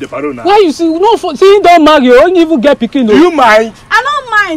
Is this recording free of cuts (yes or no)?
yes